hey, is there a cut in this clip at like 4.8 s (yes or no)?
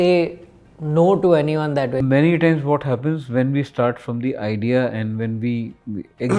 no